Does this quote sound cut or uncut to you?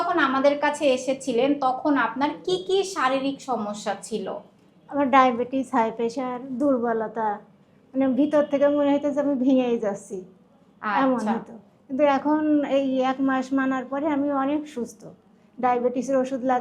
uncut